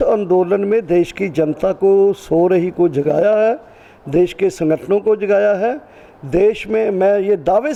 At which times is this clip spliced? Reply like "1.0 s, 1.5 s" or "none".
none